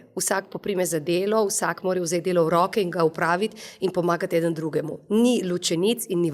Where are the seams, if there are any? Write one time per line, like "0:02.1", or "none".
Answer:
none